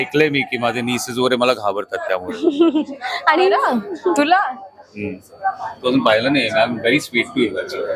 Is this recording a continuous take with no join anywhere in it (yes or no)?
yes